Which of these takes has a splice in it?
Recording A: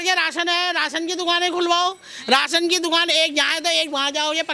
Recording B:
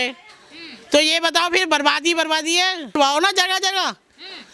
B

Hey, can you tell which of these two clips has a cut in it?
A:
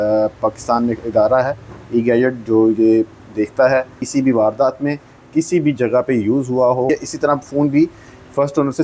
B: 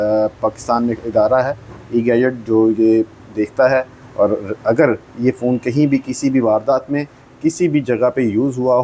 A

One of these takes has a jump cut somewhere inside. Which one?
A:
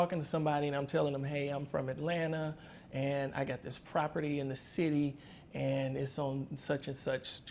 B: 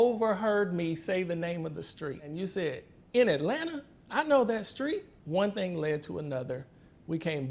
B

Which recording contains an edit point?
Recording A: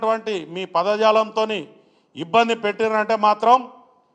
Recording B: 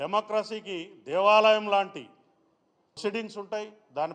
B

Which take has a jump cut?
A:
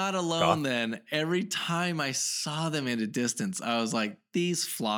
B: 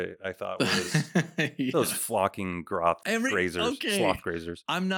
B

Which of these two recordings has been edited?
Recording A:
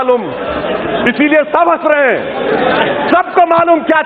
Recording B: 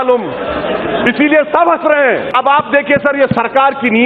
B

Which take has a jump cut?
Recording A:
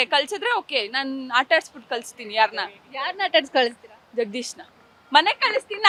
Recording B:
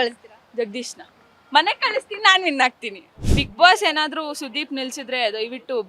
B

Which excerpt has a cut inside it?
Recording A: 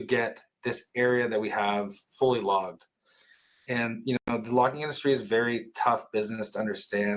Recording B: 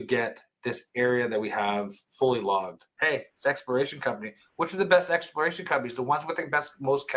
B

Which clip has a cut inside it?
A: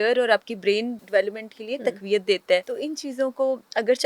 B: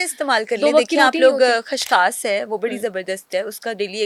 A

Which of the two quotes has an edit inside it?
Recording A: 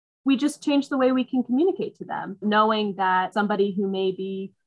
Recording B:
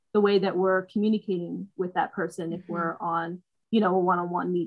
A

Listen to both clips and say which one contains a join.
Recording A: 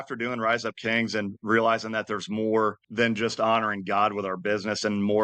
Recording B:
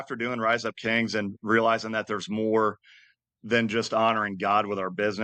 A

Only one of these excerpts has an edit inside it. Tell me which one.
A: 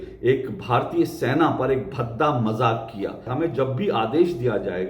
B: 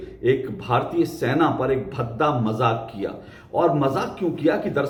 A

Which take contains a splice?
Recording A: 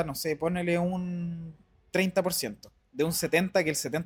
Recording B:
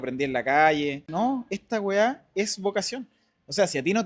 B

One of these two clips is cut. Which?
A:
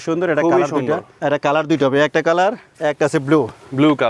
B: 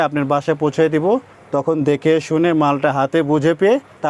A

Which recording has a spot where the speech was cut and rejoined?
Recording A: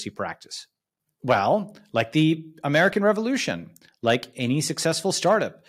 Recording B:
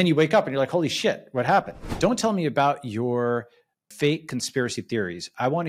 B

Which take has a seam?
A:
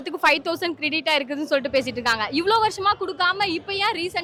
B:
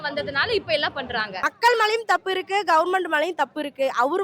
B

